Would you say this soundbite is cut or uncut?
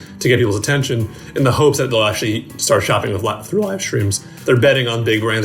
cut